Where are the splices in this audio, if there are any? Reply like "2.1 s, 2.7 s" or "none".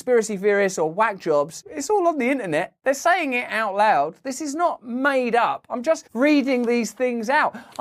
none